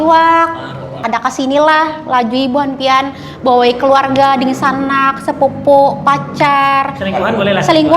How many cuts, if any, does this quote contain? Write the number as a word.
one